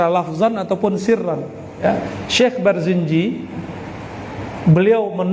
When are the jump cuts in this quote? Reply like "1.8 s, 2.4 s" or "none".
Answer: 1.8 s